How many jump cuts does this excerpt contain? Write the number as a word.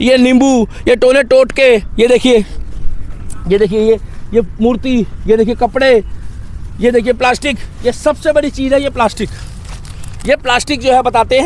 zero